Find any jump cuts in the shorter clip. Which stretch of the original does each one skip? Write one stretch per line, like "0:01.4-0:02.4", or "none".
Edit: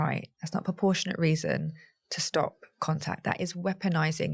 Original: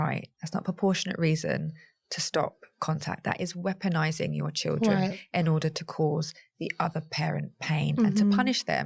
none